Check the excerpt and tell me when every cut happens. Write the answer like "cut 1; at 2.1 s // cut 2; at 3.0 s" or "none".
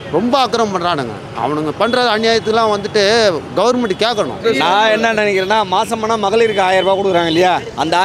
cut 1; at 4.4 s